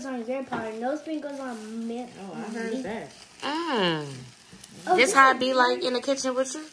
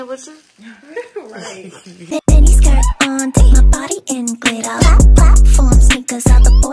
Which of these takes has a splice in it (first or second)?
second